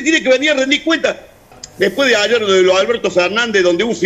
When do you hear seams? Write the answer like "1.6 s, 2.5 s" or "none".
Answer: 1.6 s